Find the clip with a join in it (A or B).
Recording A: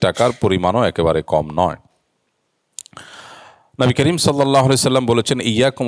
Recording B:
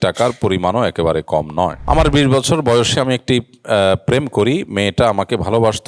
B